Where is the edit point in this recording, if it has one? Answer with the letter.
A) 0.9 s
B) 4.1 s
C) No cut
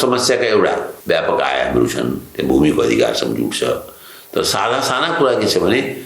A